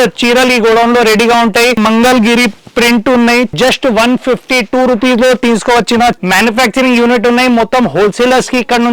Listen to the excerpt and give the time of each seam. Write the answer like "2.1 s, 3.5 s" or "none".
1.8 s, 3.5 s, 6.2 s